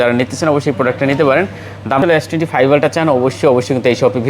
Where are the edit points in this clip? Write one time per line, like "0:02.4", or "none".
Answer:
0:02.0